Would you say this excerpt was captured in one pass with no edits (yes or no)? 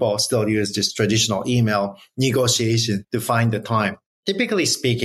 no